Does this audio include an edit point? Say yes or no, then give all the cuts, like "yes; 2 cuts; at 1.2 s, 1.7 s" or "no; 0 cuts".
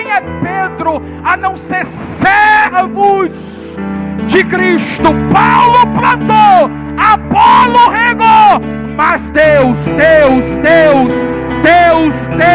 no; 0 cuts